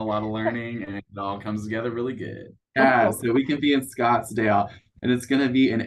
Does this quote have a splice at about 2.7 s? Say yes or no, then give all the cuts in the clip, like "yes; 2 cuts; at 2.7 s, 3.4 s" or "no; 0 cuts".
yes; 1 cut; at 2.7 s